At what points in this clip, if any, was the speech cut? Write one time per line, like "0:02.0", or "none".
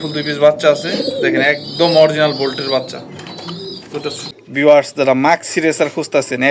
0:04.3